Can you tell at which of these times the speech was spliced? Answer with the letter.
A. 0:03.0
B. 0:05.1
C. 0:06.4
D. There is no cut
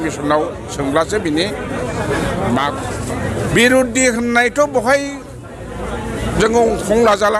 A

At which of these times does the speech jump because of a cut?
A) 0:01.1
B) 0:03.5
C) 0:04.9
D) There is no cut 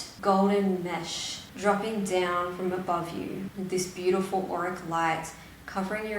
B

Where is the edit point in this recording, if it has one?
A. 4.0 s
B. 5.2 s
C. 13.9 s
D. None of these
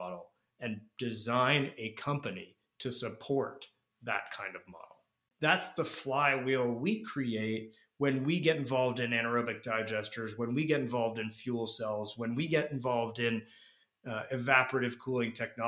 B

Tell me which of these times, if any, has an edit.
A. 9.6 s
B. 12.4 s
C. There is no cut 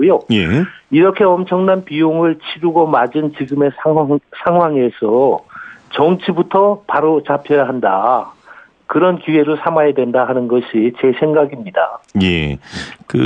A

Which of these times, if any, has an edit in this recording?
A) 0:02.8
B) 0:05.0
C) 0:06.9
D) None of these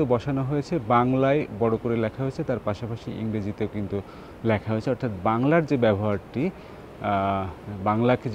D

